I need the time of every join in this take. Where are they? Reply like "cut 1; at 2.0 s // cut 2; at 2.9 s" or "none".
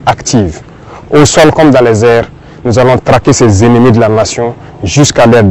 none